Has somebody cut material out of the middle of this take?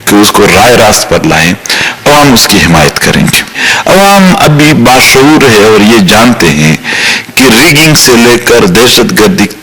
no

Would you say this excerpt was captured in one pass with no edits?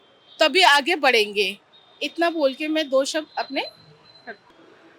yes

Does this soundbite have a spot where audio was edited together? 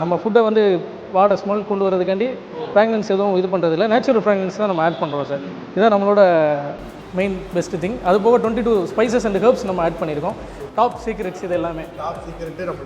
yes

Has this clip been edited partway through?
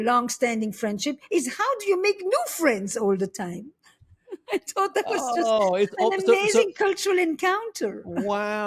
no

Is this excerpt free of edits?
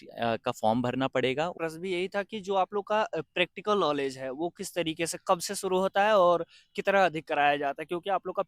no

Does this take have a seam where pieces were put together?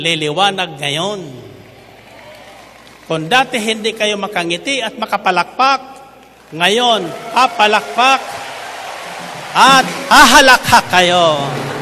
no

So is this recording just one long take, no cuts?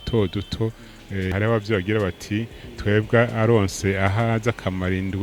no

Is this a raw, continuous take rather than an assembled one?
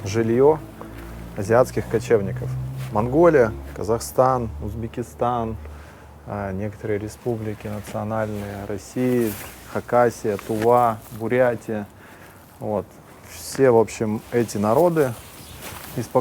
yes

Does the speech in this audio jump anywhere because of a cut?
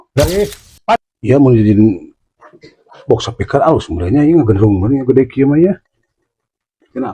yes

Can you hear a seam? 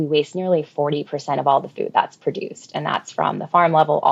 no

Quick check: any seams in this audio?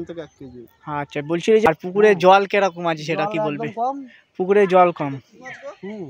yes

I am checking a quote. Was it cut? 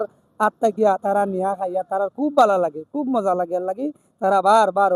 no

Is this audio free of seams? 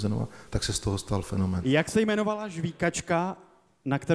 no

